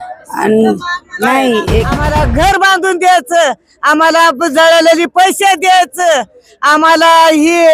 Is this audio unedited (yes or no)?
no